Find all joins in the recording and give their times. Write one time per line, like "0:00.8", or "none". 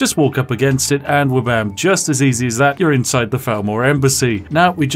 none